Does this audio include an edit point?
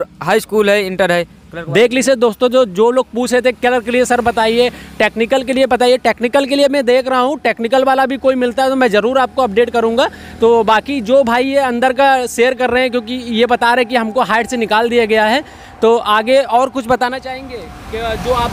no; 0 cuts

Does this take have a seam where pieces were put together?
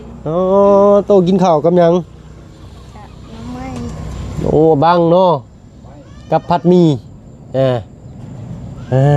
no; 0 cuts

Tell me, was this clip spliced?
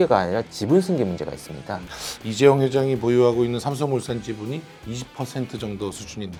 no; 0 cuts

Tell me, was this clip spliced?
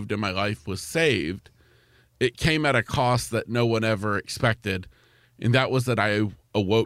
no; 0 cuts

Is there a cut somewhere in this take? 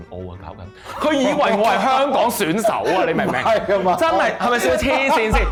no; 0 cuts

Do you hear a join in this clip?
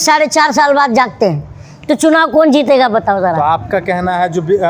no; 0 cuts

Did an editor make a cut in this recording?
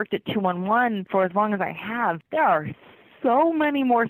yes; 1 cut; at 1.0 s

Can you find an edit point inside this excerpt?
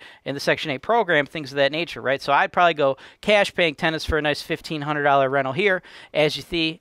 no; 0 cuts

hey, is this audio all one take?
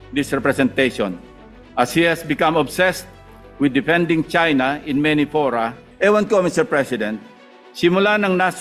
no; 1 cut; at 5.8 s

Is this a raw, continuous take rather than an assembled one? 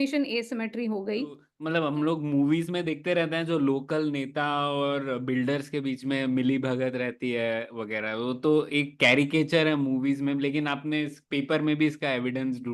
no; 1 cut; at 1.5 s

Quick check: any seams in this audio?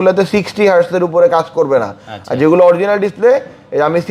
no; 0 cuts

